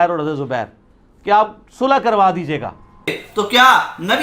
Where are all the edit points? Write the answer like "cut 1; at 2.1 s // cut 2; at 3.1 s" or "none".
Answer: cut 1; at 3.2 s